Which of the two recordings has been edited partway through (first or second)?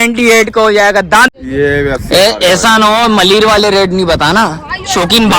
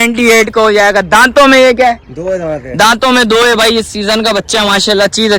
first